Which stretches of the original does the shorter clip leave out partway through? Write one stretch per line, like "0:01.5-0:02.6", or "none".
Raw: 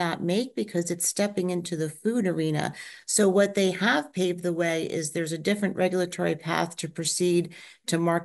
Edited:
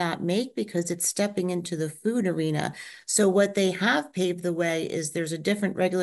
none